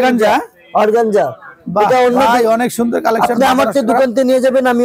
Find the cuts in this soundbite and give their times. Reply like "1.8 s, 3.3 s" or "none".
none